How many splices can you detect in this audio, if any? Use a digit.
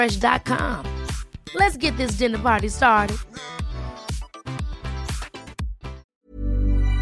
1